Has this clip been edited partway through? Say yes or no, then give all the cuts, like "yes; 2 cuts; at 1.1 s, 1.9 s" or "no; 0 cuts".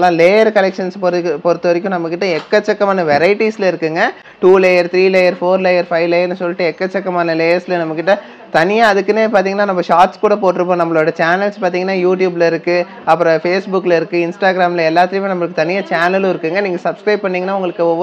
no; 0 cuts